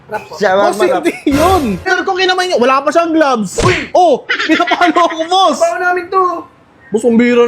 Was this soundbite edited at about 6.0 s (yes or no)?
no